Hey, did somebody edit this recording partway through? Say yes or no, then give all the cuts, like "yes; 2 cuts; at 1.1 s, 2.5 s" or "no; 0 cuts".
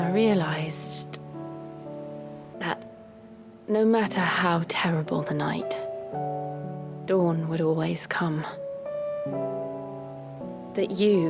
yes; 3 cuts; at 2.6 s, 7.0 s, 10.5 s